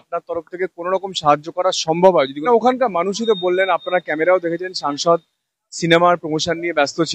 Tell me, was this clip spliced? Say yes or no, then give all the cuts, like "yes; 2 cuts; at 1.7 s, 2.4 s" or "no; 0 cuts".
yes; 1 cut; at 2.3 s